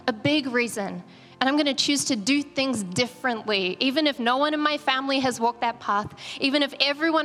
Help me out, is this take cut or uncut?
uncut